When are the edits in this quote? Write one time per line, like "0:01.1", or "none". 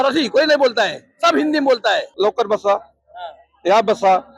0:02.1